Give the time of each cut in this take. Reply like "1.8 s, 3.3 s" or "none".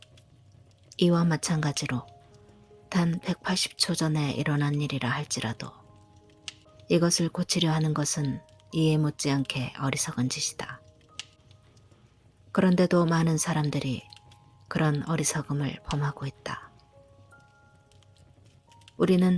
none